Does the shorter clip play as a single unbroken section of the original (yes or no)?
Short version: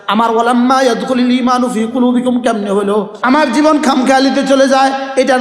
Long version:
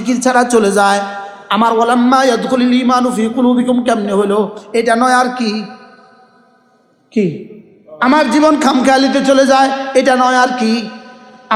no